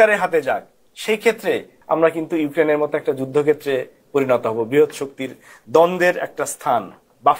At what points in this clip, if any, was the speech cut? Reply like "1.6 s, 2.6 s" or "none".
1.7 s